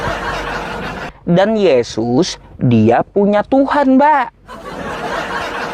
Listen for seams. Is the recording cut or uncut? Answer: cut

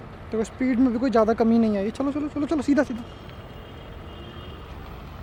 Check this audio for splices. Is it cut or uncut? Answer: uncut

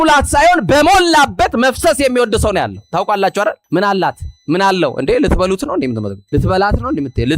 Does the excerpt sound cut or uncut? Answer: cut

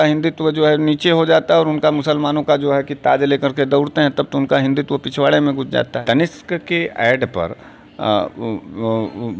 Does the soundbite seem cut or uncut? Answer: cut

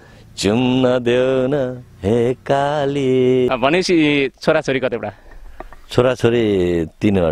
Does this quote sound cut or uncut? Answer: cut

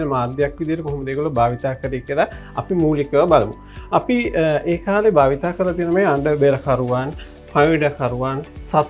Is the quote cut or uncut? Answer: uncut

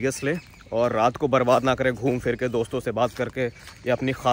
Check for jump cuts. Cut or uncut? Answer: uncut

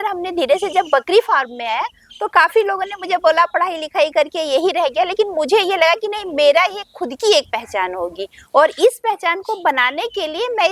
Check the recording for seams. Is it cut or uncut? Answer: uncut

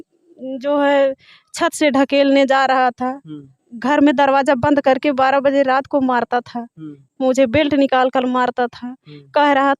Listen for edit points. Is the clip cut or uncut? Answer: uncut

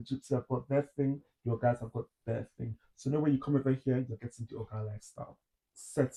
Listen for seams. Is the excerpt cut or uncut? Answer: uncut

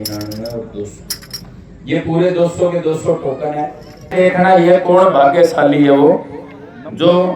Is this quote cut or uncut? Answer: cut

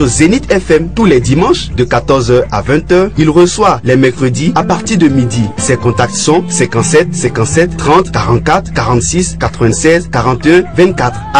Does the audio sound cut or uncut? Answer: cut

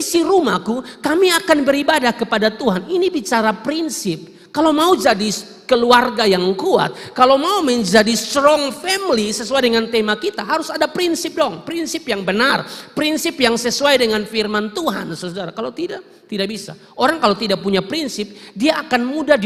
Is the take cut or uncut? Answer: uncut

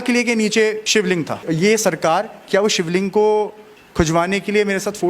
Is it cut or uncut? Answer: cut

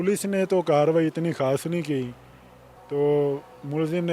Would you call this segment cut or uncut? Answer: uncut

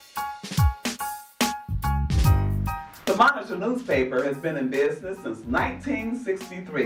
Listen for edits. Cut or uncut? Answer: cut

